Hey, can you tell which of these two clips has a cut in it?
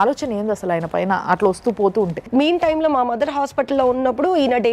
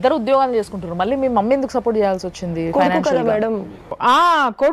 first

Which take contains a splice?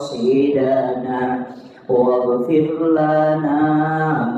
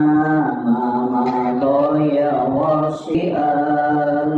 second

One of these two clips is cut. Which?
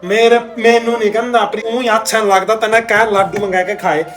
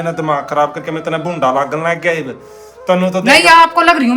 first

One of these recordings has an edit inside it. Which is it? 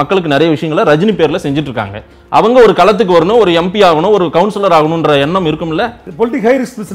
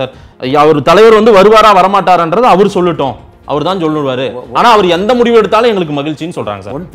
first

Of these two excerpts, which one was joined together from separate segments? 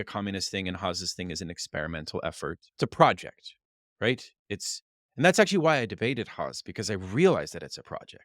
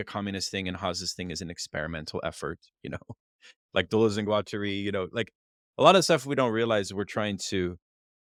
first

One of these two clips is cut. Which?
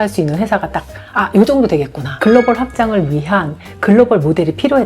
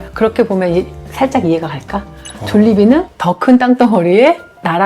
first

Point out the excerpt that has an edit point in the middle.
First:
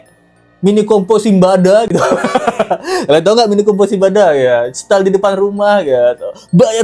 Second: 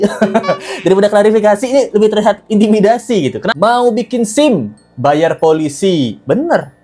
second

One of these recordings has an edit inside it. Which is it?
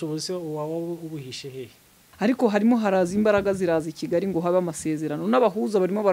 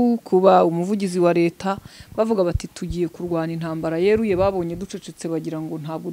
first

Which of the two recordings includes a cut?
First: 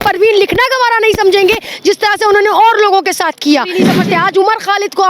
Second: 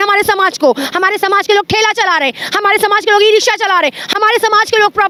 first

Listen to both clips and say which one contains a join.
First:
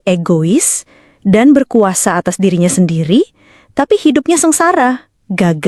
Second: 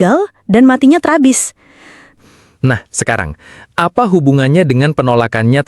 second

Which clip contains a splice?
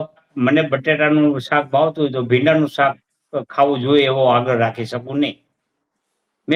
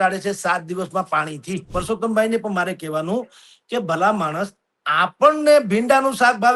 second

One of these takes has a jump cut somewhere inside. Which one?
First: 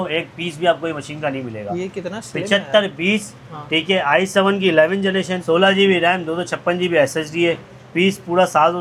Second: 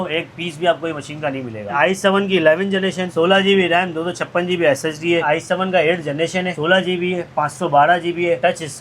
second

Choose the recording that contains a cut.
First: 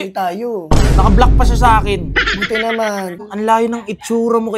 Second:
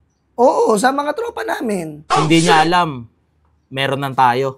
first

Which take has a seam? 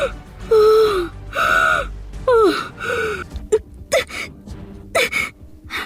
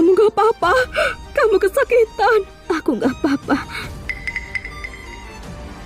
first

